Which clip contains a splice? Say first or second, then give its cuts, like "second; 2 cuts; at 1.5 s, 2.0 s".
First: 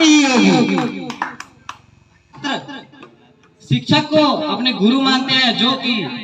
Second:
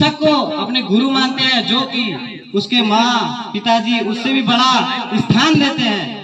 first; 1 cut; at 2.4 s